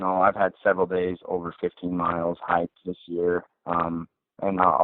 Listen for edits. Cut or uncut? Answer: uncut